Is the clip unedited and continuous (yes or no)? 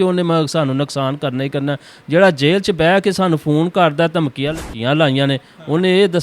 no